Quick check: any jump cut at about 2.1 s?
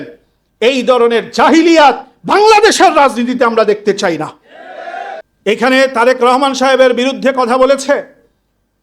no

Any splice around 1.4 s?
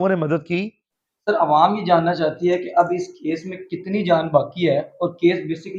yes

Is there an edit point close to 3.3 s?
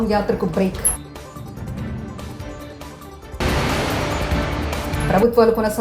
yes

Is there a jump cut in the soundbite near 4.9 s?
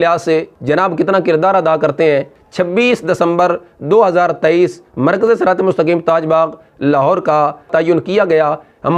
no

